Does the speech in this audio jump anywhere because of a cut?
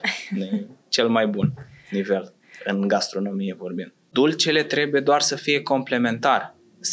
yes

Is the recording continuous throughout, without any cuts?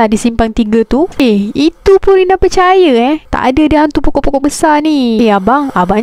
no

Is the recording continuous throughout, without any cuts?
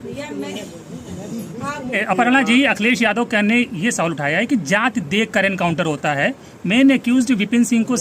no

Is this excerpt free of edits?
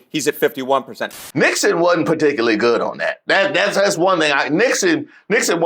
no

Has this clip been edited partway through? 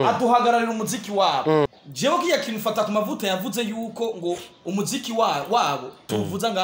yes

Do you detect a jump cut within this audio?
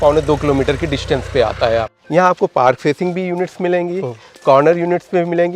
yes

